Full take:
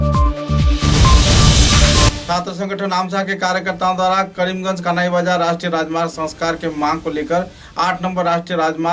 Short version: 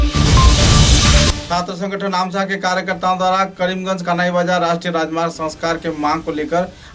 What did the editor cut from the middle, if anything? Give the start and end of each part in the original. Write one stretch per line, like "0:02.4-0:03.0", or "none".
0:02.0-0:02.1